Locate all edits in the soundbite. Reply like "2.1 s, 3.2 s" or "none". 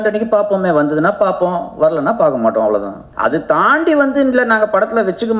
3.0 s